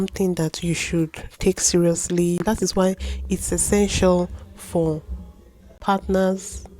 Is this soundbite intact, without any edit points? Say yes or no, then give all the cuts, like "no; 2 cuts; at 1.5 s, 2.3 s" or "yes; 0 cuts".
no; 2 cuts; at 2.4 s, 5.8 s